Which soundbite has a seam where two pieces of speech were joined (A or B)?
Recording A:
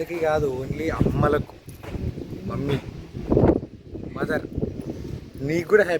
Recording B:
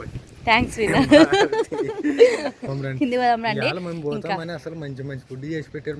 B